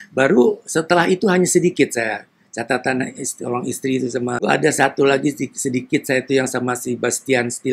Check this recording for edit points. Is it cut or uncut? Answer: cut